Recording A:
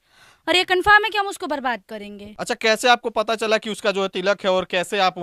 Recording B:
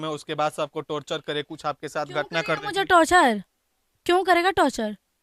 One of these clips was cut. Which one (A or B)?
A